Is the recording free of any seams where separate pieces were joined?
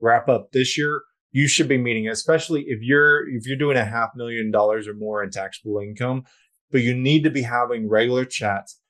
no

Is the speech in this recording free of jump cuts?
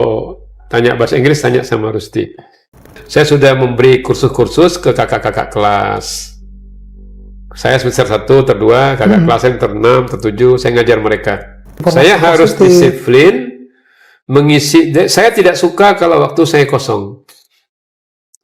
no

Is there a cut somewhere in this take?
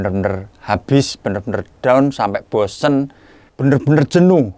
yes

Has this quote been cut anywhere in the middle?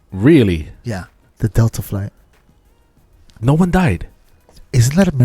yes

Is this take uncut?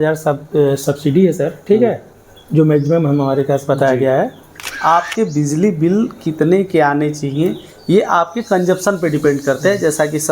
no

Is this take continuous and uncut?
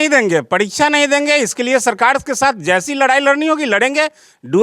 yes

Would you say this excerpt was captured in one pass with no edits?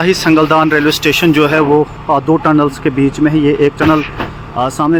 yes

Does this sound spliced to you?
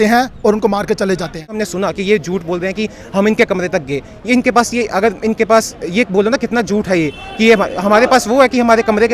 yes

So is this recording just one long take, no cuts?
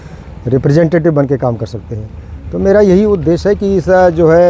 yes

